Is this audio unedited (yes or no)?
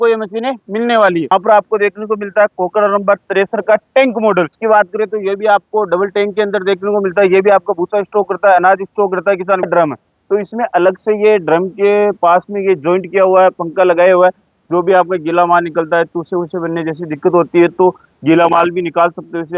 no